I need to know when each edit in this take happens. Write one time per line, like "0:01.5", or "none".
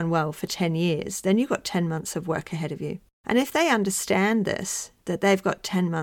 0:03.1